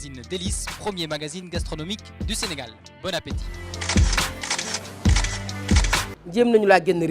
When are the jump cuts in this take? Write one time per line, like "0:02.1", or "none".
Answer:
0:06.2